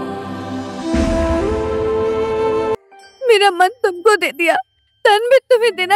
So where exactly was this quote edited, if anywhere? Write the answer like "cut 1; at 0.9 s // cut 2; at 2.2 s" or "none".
cut 1; at 2.8 s